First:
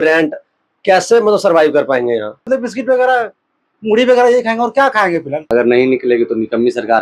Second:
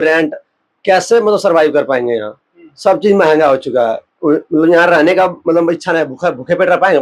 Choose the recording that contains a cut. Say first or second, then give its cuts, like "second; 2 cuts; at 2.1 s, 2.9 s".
first; 2 cuts; at 2.4 s, 5.5 s